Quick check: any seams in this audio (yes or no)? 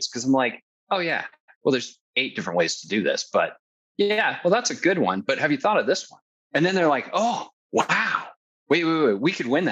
yes